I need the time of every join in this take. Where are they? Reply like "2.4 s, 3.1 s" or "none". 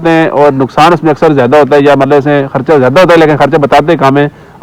none